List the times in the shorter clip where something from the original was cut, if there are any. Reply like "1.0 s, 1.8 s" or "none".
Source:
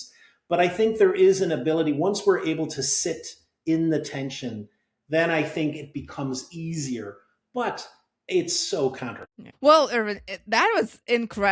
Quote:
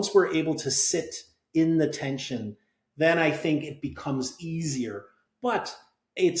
none